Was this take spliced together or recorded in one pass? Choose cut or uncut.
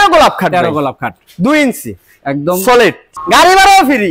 cut